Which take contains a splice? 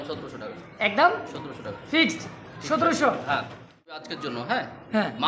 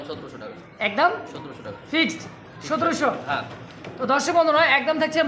first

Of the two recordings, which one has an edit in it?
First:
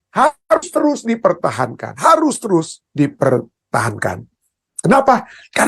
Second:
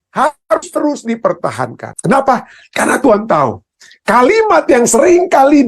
second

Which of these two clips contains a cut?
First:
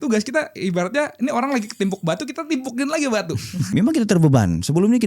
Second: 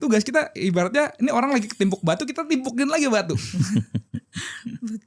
first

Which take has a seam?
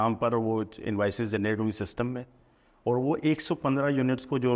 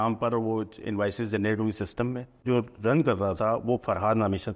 second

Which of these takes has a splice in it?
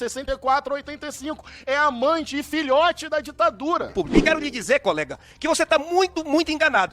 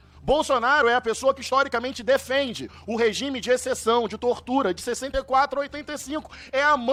first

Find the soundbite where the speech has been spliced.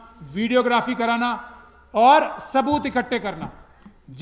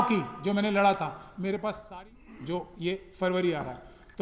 second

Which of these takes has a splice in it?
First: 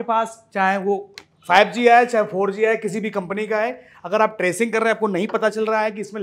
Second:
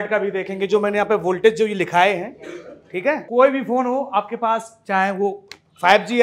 second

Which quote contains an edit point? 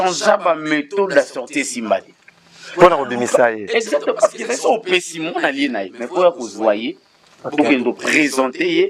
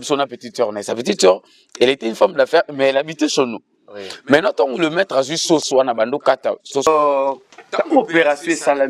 second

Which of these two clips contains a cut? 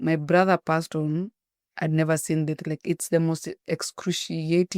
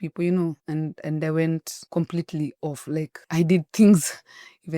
second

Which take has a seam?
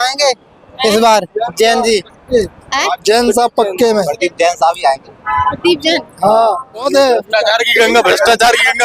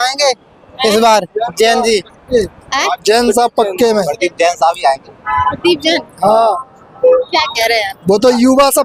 first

